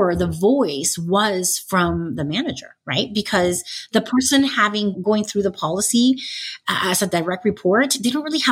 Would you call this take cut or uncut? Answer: cut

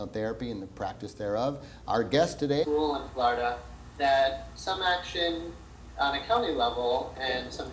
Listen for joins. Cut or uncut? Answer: uncut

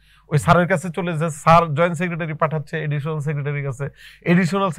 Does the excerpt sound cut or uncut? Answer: uncut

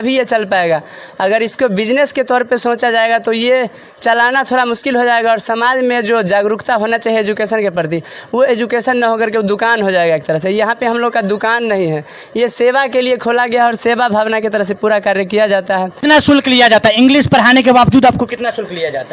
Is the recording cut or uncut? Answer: cut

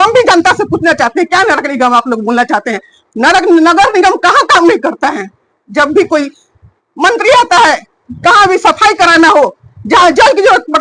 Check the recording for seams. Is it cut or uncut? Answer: uncut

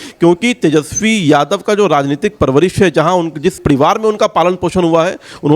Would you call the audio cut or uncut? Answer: cut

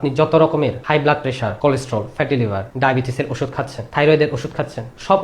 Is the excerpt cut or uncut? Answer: cut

